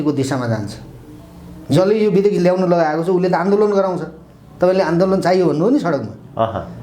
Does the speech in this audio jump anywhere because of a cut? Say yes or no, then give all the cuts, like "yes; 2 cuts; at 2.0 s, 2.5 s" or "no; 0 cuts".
no; 0 cuts